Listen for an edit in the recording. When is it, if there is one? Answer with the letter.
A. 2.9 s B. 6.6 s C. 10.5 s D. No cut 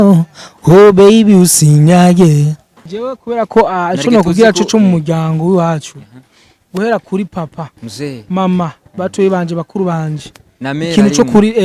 A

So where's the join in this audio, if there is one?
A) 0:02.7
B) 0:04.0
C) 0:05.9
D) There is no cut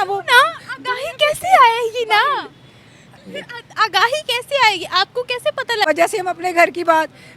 C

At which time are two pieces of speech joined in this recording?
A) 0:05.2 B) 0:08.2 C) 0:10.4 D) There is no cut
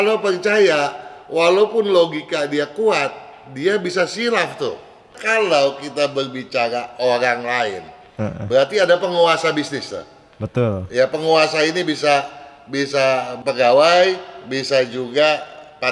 A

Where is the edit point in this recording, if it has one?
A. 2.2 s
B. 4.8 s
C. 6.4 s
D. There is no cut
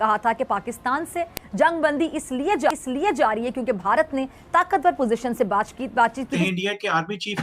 C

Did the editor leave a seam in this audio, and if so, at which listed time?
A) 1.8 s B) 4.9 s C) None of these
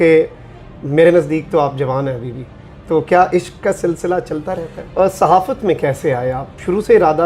B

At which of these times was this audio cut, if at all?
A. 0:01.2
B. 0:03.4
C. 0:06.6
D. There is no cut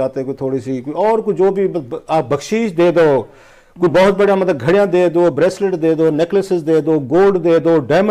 D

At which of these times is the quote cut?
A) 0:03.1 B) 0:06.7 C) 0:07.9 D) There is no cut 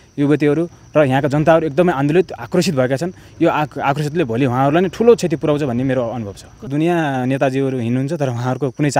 B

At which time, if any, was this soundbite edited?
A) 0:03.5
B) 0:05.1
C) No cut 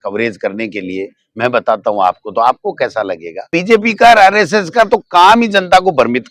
A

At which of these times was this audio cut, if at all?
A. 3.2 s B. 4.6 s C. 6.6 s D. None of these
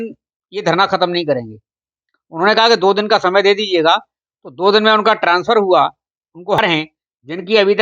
C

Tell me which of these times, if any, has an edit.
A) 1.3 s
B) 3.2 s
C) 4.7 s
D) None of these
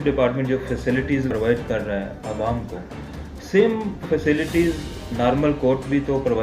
A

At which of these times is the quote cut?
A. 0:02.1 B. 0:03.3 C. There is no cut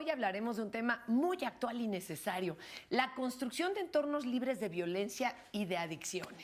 A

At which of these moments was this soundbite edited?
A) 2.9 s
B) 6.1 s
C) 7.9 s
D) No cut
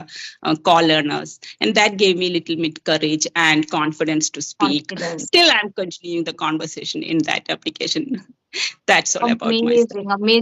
D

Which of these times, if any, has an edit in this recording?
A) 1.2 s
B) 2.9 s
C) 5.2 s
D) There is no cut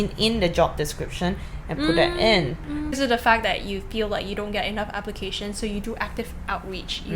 B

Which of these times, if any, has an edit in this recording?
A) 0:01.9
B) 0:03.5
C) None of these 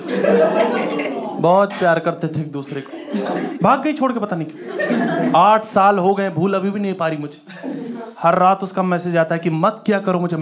B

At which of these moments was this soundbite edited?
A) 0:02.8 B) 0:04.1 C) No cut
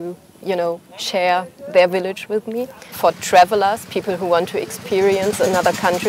A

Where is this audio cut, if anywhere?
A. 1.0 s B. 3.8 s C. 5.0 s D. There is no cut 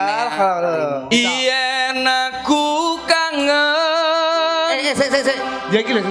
A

